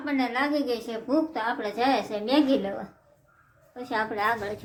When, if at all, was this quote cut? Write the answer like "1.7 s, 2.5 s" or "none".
none